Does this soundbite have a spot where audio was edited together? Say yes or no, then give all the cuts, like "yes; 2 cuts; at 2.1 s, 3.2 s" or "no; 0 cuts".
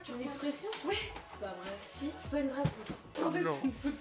yes; 1 cut; at 3.0 s